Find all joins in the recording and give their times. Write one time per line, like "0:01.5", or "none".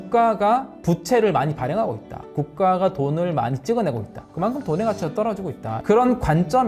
0:04.1
0:05.7